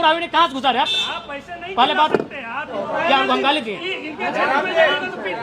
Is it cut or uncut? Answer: cut